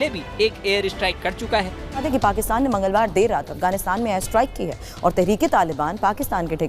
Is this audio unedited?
no; 1 cut; at 2.0 s

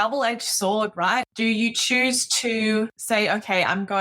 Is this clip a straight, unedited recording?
no; 2 cuts; at 1.3 s, 3.0 s

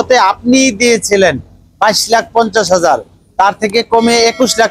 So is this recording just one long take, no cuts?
yes; 0 cuts

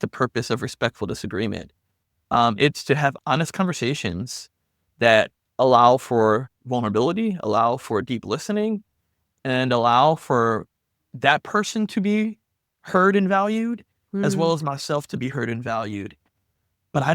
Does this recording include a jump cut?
no; 0 cuts

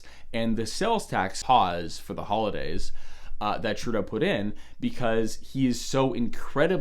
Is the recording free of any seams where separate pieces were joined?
no; 1 cut; at 1.4 s

